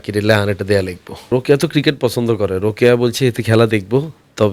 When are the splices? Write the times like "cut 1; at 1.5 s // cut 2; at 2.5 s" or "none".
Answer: cut 1; at 1.3 s